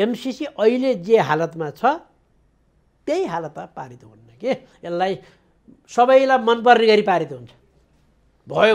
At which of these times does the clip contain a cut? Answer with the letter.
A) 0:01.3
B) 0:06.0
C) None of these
C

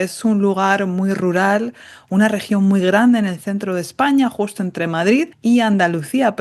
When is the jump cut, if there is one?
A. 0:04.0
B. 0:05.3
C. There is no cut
B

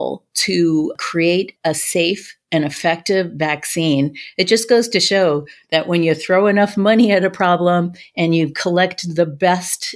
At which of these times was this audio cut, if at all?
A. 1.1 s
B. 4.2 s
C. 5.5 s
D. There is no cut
A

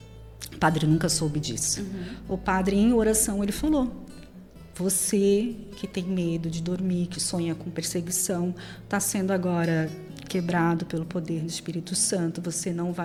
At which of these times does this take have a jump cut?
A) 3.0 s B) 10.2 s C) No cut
C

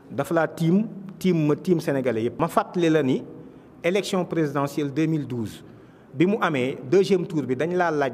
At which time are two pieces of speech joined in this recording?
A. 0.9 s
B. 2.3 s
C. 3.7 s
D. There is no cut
B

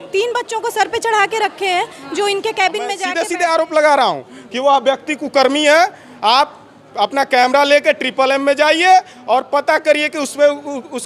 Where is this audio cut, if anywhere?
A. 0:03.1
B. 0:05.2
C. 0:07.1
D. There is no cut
A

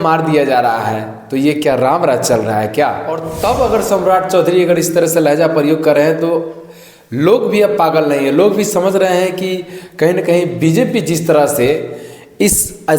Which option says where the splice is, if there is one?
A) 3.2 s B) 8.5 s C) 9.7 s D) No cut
A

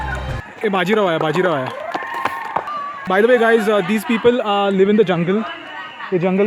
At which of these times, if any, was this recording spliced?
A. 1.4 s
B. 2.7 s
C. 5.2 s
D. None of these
B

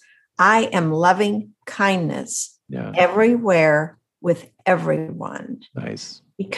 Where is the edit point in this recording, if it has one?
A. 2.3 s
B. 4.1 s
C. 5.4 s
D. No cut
D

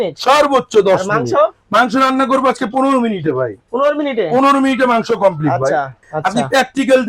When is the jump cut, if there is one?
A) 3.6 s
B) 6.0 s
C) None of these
B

